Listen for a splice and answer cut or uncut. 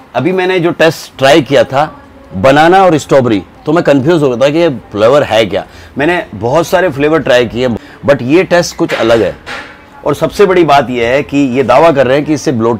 uncut